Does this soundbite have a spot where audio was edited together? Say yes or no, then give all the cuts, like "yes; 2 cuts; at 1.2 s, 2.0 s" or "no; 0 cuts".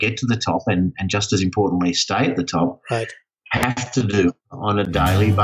no; 0 cuts